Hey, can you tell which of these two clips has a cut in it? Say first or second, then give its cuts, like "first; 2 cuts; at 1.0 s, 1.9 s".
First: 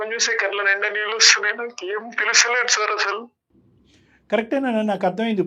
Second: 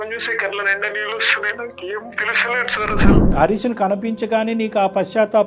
second; 1 cut; at 3.3 s